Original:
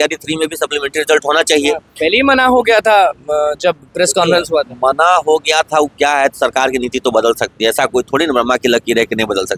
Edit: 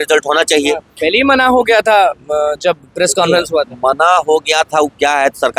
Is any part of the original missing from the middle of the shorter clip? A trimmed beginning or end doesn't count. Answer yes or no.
no